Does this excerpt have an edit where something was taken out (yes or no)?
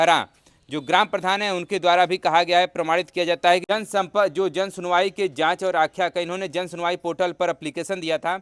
yes